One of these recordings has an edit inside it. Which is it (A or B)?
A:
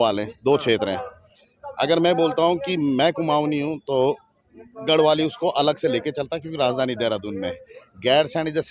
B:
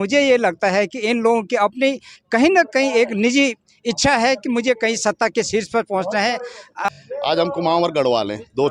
B